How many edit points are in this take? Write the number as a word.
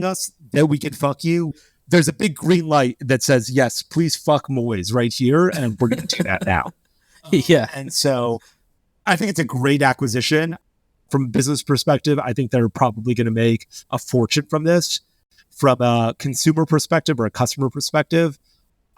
one